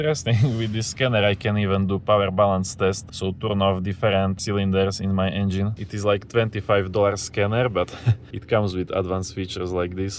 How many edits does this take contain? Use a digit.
3